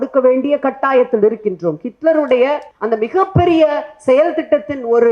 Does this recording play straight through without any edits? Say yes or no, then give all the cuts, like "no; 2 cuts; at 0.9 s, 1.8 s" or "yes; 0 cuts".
no; 1 cut; at 2.7 s